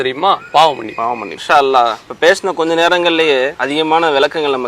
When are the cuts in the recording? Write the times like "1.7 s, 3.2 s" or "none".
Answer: 1.3 s, 2.0 s, 3.6 s